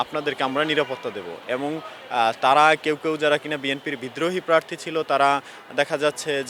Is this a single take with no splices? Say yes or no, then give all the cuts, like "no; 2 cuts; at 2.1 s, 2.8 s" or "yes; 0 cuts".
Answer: yes; 0 cuts